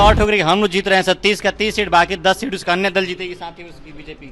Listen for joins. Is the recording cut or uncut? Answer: uncut